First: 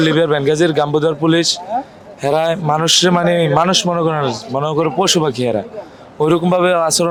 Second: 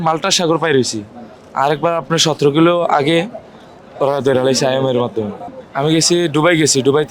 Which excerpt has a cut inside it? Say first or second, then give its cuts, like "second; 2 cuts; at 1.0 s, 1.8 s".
second; 1 cut; at 5.6 s